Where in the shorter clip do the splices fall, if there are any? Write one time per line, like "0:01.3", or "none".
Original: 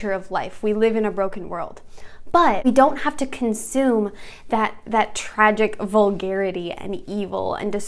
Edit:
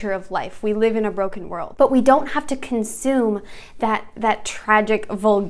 0:01.9